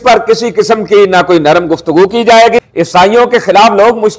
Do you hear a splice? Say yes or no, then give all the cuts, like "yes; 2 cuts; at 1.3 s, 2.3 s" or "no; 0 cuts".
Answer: yes; 1 cut; at 2.6 s